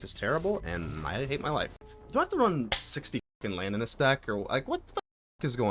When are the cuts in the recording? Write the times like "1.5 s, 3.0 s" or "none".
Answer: 1.9 s